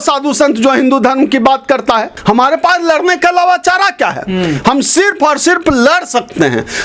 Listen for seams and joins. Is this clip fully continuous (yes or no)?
no